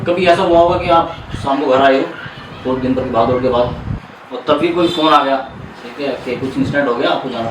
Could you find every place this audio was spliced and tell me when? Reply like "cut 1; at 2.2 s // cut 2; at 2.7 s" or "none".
none